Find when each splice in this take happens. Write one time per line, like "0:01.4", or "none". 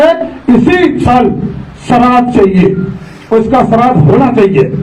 none